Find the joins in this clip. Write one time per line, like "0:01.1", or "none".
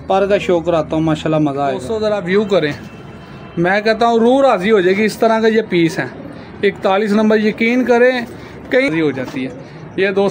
0:01.9
0:08.9